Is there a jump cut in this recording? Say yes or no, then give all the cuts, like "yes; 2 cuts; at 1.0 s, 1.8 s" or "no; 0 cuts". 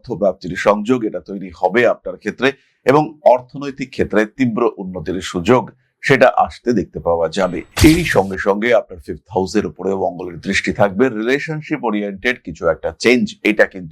yes; 1 cut; at 7.6 s